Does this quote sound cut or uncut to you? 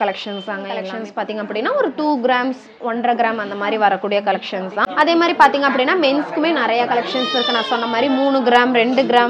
cut